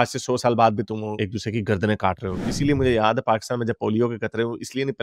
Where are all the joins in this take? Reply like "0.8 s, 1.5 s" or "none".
2.4 s